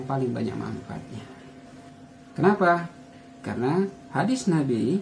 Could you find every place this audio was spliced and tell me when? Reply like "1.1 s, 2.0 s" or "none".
1.8 s